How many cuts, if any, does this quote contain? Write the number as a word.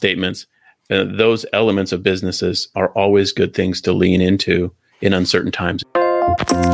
one